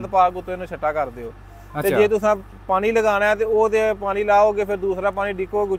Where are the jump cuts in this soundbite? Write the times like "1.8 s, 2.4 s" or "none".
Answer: none